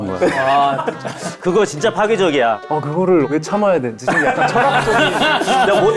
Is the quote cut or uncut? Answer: cut